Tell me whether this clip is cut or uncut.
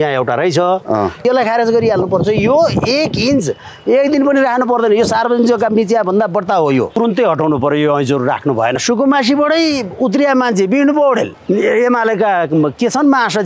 cut